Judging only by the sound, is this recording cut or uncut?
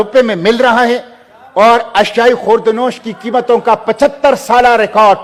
uncut